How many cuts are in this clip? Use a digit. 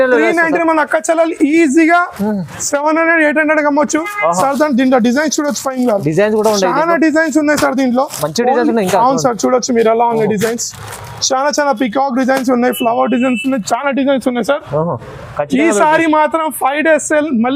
0